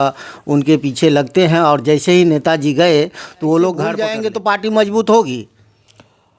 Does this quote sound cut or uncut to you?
cut